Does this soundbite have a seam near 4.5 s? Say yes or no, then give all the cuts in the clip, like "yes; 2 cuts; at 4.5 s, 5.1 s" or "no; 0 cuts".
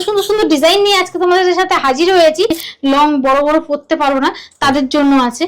no; 1 cut; at 2.6 s